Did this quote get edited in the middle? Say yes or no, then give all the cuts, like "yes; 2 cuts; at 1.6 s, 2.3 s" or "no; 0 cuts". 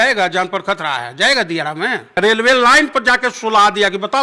yes; 1 cut; at 2.2 s